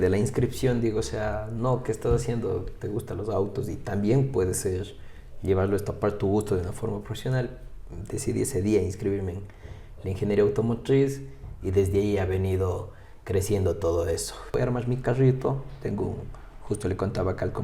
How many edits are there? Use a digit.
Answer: 1